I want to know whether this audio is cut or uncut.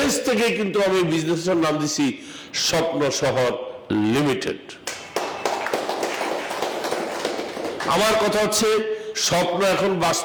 uncut